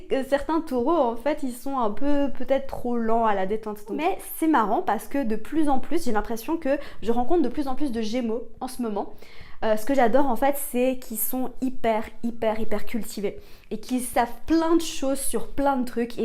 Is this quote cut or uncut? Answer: cut